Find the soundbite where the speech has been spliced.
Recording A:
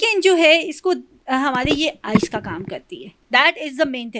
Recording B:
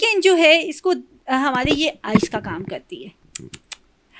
B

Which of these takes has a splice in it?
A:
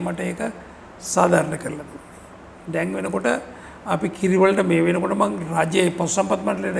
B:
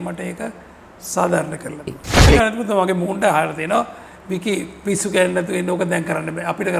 B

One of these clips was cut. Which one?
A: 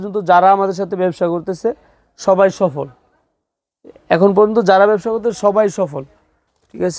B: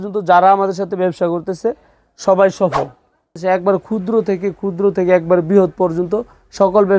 B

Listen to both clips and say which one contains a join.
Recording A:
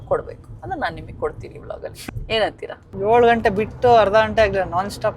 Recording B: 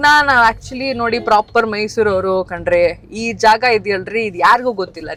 A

